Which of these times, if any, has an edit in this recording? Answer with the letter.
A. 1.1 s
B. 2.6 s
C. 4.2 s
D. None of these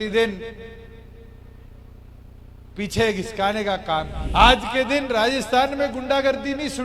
C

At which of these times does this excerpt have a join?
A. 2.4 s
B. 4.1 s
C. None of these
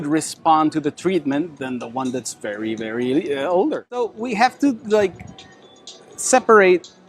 B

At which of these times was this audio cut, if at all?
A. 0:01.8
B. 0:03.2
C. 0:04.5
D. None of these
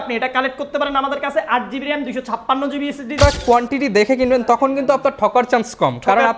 B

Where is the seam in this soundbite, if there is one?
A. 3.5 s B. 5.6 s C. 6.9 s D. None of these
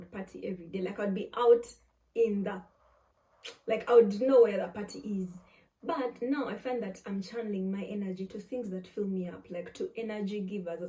D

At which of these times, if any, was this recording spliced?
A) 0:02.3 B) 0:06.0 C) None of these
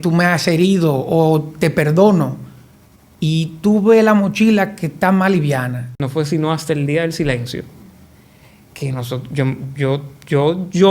B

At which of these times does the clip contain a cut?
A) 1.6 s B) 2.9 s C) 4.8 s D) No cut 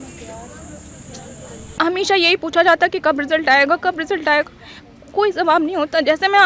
A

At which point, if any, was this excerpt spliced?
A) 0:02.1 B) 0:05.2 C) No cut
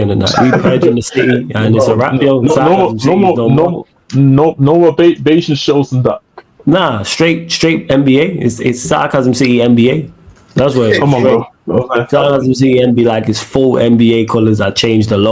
C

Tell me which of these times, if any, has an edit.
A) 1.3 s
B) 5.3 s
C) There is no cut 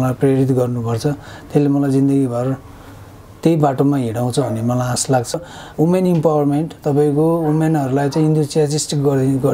B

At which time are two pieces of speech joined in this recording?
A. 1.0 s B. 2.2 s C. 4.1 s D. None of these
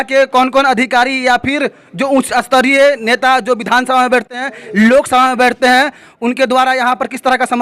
D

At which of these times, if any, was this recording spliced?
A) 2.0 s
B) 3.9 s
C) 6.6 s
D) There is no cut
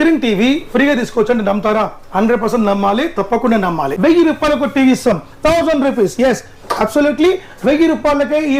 B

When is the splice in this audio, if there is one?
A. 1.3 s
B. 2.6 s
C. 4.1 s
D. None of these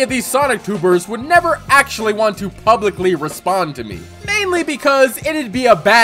D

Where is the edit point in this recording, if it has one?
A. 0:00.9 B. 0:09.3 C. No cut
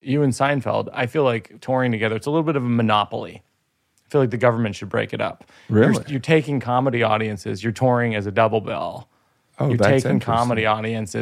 A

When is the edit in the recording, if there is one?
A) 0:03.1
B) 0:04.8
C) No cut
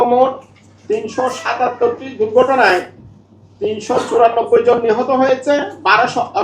C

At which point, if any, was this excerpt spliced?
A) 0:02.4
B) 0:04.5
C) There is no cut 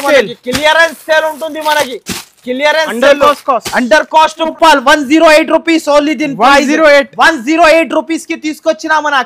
B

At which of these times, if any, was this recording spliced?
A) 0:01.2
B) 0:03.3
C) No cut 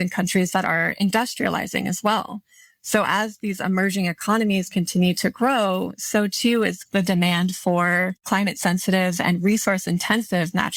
C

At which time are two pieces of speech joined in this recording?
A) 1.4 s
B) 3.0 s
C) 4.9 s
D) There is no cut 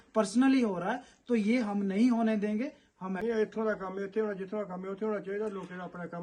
B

